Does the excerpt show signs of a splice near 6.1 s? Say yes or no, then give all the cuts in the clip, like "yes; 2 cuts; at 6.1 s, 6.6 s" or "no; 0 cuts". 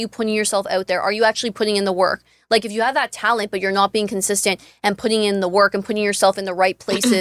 no; 0 cuts